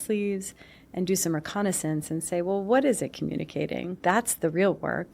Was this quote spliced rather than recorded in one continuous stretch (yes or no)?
yes